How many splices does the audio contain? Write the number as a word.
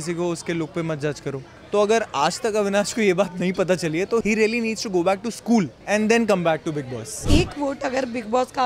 four